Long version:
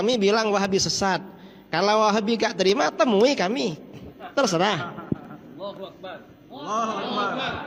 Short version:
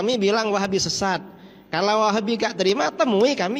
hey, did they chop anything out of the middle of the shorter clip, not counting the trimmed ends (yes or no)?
no